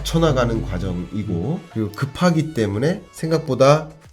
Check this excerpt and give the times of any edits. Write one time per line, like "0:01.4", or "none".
0:01.7
0:03.1